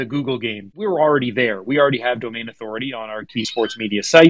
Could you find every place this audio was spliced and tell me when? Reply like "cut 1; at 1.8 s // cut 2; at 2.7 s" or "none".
cut 1; at 0.9 s // cut 2; at 3.3 s